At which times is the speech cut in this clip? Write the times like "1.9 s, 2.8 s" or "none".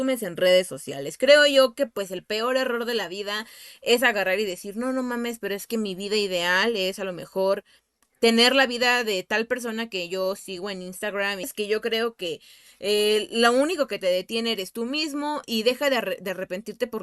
11.5 s